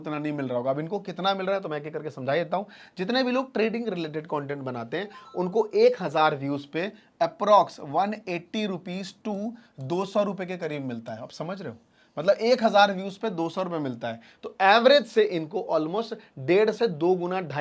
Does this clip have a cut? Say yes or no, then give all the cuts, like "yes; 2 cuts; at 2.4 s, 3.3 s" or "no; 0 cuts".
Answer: no; 0 cuts